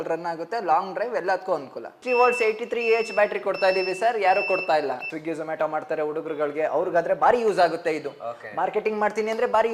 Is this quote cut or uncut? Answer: cut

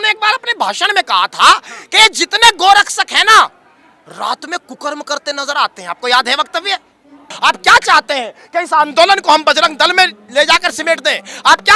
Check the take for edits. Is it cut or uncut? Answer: cut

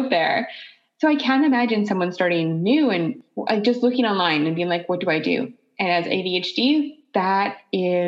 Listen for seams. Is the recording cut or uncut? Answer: cut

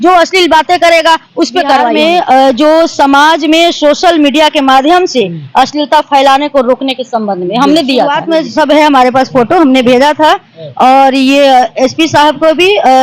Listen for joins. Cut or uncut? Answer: cut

